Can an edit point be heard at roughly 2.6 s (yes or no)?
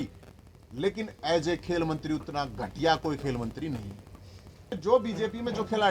no